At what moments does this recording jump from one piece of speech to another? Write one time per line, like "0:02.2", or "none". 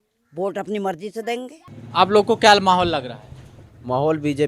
0:01.6